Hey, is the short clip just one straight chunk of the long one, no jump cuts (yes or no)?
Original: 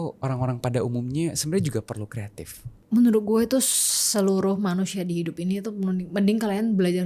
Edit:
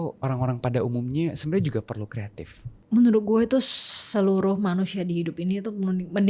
yes